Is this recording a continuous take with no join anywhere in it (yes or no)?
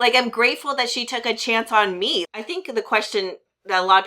no